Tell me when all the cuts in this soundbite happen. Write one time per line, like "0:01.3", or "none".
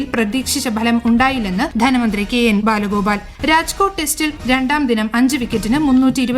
0:01.7
0:03.3